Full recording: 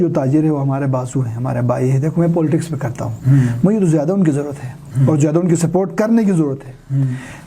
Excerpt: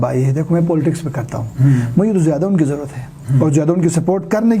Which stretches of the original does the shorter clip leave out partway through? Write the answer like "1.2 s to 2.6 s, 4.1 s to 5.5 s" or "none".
none